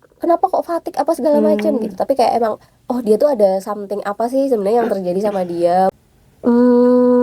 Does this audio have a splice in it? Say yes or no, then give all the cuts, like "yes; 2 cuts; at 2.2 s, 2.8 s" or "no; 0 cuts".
yes; 1 cut; at 5.9 s